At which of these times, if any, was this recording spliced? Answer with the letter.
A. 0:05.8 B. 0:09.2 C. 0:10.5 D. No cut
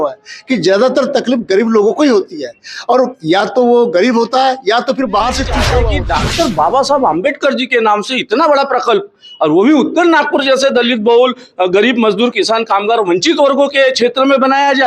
A